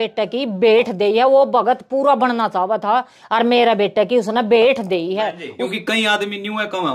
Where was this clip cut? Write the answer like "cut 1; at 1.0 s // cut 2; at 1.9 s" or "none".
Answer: cut 1; at 5.6 s